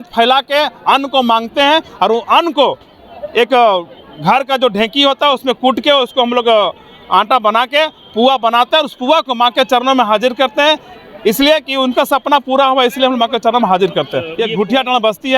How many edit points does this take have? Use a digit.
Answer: 0